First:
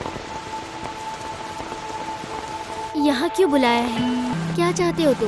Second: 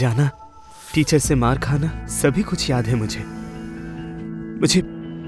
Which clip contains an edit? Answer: first; 1 cut; at 4.3 s

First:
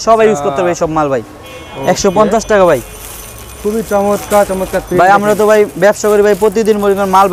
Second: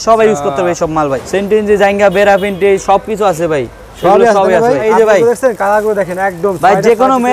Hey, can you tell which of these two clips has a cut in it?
second; 2 cuts; at 1.2 s, 4.8 s

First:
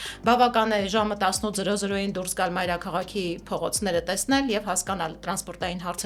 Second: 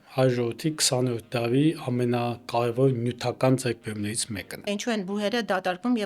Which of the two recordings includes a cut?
second; 1 cut; at 4.7 s

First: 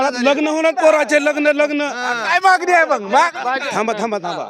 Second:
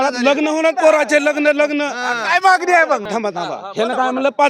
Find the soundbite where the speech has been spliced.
second; 1 cut; at 3.1 s

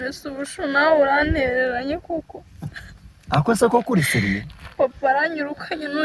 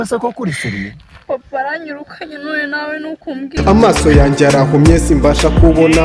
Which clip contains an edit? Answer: second; 1 cut; at 3.5 s

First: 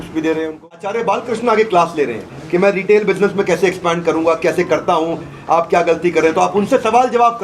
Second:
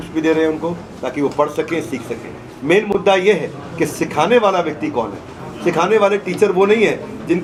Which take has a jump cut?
first; 1 cut; at 1.0 s

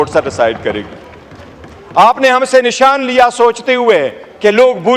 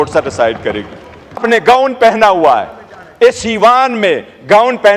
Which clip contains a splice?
second; 1 cut; at 1.4 s

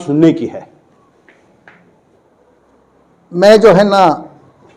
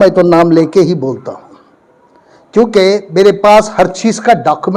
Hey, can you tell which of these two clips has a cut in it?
first; 1 cut; at 2.2 s

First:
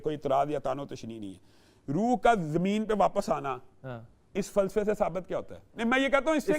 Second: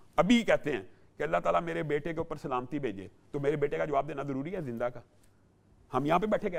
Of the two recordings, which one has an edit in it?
first; 1 cut; at 5.6 s

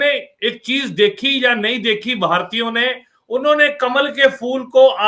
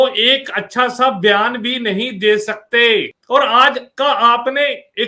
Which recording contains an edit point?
second; 1 cut; at 3.2 s

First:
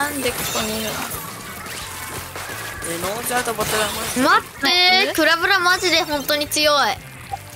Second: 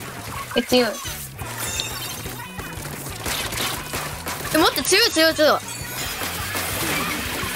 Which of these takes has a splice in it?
second; 1 cut; at 6.0 s

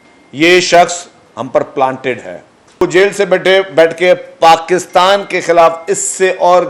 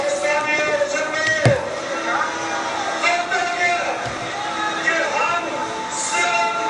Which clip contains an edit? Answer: first; 1 cut; at 2.8 s

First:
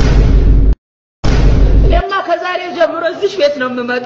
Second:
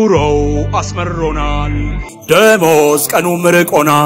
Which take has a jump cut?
first; 1 cut; at 1.1 s

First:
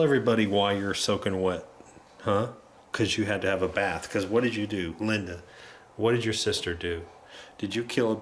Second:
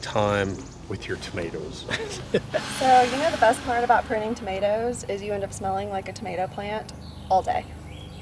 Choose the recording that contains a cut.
second; 1 cut; at 2.7 s

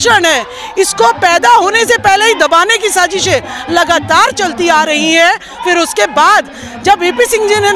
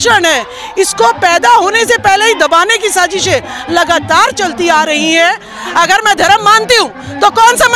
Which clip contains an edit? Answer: second; 1 cut; at 5.5 s

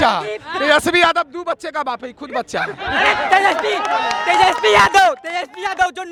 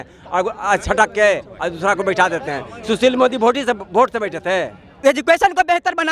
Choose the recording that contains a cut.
second; 1 cut; at 4.8 s

